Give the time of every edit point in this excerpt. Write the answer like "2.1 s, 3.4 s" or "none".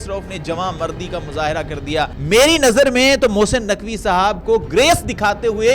2.2 s